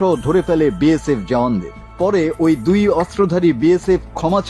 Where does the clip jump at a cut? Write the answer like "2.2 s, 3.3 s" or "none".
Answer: none